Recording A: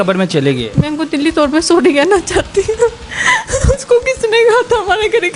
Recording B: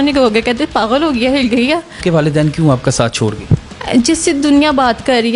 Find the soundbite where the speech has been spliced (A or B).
B